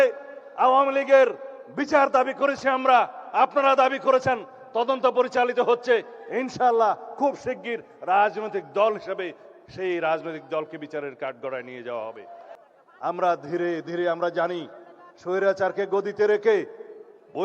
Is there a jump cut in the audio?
yes; 1 cut; at 12.4 s

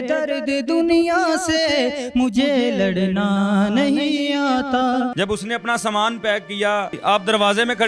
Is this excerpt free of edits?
no; 2 cuts; at 5.1 s, 7.0 s

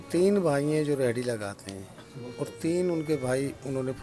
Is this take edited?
no; 0 cuts

